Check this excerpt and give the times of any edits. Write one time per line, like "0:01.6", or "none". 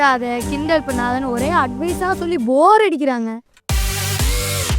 0:03.5